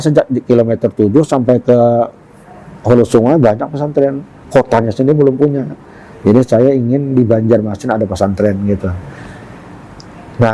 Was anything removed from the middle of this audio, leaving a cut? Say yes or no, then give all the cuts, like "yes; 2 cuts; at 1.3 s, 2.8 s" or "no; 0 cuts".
no; 0 cuts